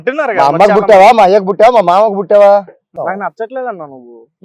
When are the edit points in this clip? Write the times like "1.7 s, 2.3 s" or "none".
2.9 s